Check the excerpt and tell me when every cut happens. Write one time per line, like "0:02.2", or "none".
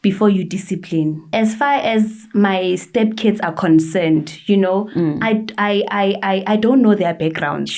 0:01.3